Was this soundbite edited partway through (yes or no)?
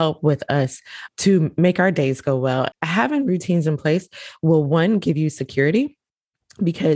yes